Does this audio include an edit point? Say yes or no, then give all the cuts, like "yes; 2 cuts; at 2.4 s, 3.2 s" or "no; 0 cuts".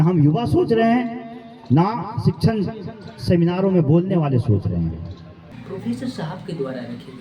yes; 1 cut; at 5.5 s